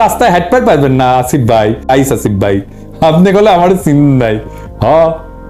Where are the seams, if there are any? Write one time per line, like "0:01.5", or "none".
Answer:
0:01.9